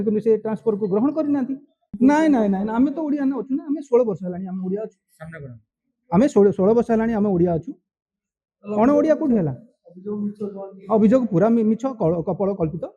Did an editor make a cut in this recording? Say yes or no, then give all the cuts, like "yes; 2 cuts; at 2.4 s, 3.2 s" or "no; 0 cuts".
yes; 1 cut; at 1.8 s